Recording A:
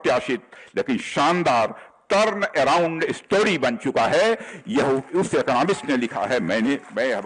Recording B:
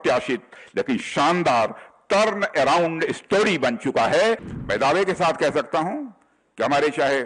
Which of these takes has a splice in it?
B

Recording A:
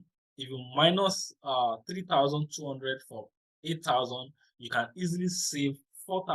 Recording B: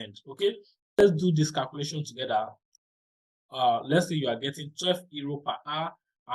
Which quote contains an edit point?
B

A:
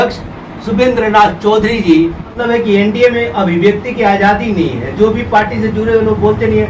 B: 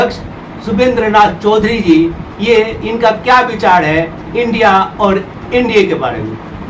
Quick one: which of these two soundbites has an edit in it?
A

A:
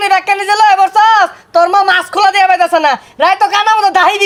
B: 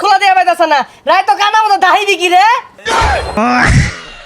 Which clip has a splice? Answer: B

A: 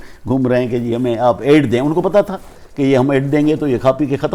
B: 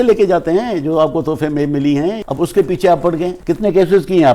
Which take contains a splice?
B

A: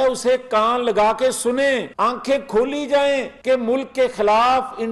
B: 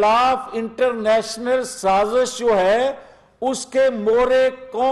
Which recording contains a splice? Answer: A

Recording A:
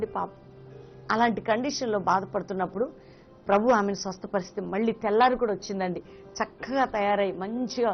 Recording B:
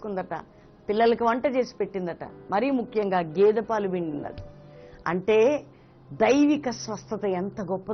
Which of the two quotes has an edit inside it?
B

